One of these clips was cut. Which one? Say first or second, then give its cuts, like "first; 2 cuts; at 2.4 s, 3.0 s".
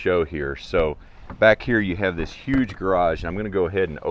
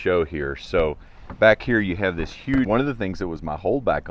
second; 1 cut; at 2.7 s